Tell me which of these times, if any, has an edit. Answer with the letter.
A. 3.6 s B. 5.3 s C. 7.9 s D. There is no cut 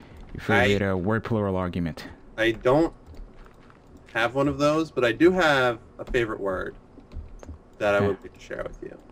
C